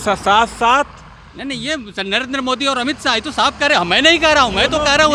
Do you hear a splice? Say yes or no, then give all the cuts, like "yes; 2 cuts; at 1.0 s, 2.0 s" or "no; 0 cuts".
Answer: no; 0 cuts